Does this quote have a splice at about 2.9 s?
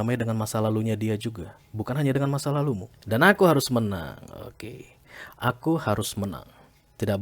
yes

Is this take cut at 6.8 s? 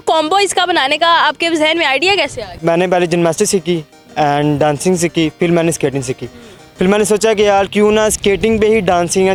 no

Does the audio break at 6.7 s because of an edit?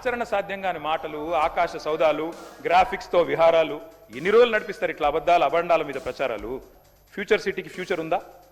yes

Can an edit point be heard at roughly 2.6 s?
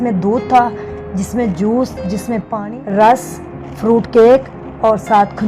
yes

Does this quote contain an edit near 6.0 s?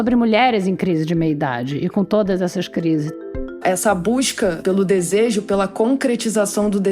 no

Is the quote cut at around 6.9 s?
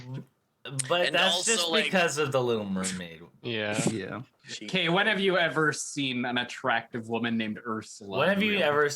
no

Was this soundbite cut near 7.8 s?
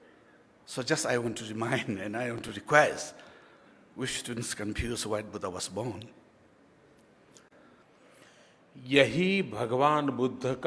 yes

